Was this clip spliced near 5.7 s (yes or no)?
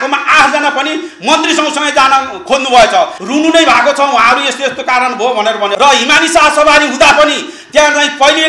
yes